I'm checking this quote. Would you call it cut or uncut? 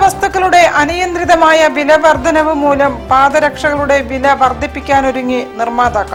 uncut